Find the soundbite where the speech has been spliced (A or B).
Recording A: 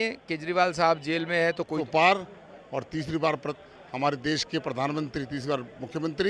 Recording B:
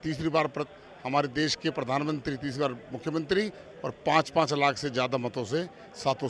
A